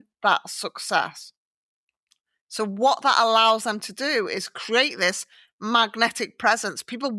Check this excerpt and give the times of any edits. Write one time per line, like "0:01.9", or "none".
none